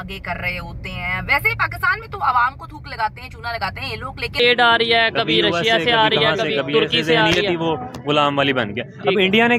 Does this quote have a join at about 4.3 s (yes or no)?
yes